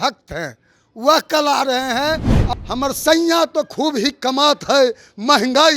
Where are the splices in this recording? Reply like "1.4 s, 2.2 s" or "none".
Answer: 2.3 s